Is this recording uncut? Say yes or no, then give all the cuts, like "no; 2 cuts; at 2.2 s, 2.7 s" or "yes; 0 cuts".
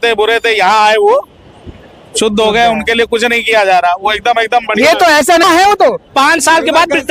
no; 1 cut; at 5.4 s